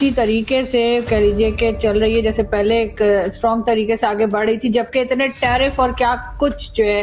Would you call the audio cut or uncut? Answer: uncut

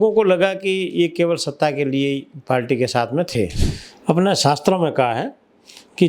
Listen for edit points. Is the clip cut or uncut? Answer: cut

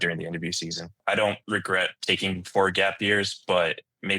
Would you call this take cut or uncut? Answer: cut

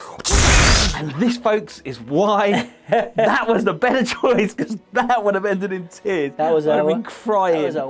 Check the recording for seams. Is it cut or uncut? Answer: cut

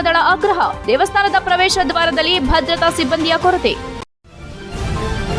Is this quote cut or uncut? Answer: cut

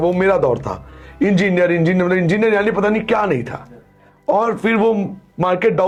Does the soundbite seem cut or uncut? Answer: uncut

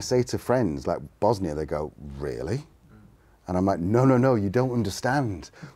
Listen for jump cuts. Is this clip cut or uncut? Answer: uncut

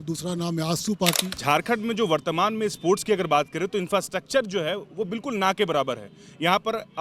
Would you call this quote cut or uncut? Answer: cut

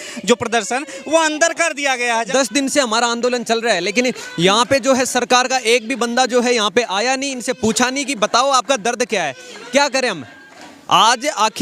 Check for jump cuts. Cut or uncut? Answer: cut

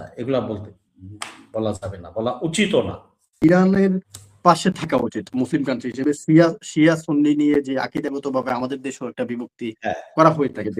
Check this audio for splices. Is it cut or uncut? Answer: cut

